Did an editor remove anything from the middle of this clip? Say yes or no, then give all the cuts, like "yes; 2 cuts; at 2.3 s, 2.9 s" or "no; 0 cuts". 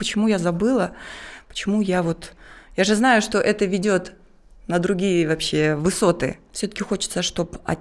yes; 1 cut; at 6.5 s